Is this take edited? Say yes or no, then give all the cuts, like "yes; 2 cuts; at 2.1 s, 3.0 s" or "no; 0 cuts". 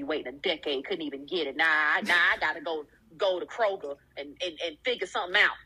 no; 0 cuts